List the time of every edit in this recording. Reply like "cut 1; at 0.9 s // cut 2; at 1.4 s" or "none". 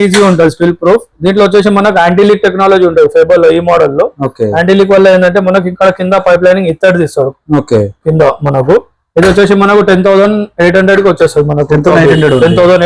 none

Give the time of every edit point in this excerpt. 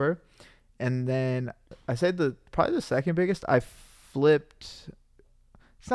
cut 1; at 1.7 s

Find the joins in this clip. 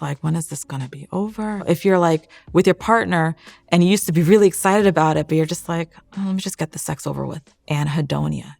cut 1; at 1.6 s // cut 2; at 7.5 s

